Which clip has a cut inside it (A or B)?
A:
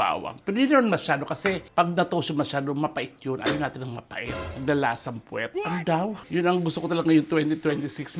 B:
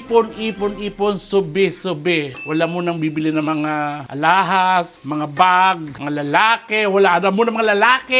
A